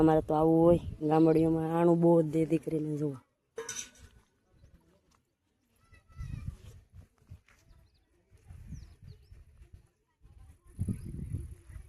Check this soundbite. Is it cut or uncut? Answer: uncut